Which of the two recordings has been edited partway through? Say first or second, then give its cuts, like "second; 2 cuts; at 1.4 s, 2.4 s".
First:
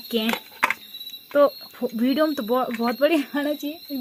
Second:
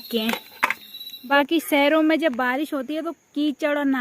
second; 1 cut; at 1.3 s